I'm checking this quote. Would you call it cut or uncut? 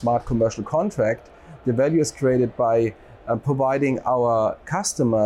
uncut